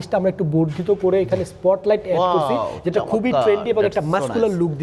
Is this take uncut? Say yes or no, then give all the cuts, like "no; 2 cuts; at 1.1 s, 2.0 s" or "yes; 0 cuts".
yes; 0 cuts